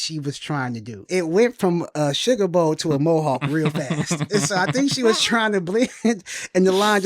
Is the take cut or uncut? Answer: cut